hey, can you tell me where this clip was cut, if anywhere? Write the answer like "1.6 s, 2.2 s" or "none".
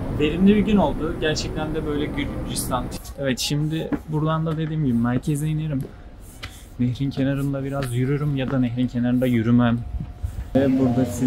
3.0 s, 10.5 s